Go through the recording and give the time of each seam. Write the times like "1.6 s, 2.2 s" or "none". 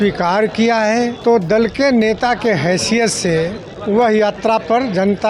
1.2 s, 3.7 s